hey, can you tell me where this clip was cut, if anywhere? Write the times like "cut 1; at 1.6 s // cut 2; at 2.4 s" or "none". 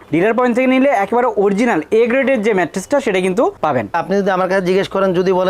cut 1; at 3.9 s